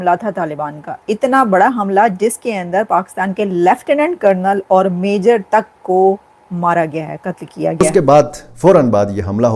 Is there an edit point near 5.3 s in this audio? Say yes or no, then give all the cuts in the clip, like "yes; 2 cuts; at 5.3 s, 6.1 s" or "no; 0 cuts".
no; 1 cut; at 7.8 s